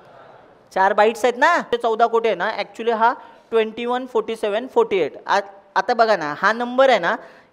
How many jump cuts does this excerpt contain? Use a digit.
1